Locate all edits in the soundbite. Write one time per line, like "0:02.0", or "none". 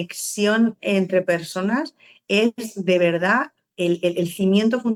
none

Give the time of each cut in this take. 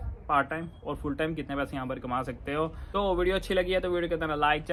none

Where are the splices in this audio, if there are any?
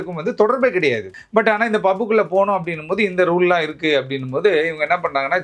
0:01.2

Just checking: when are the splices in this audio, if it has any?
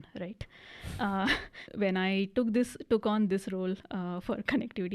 0:01.6

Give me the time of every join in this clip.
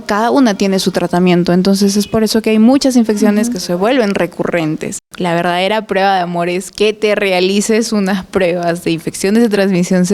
0:05.1

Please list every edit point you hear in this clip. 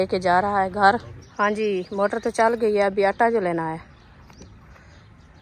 0:01.2

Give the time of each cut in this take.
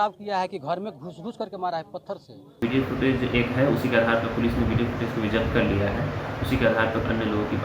0:02.5

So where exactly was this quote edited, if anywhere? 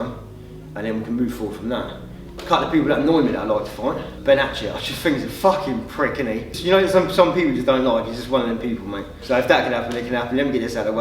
0:02.4
0:04.1
0:06.5
0:09.1

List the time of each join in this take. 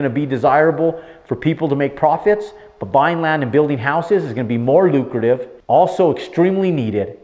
none

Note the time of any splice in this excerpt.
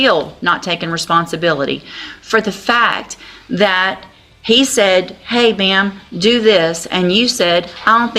none

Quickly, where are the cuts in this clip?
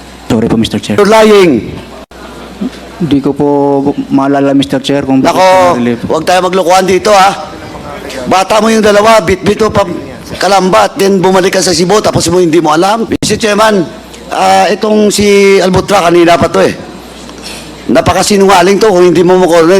0:01.0
0:13.1

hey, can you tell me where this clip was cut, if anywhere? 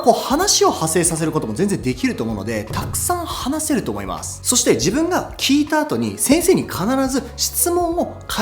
none

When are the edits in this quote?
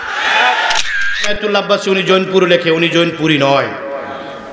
0:01.1

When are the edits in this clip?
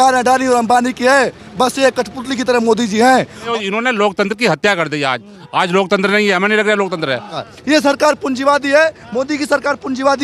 0:03.5
0:07.4

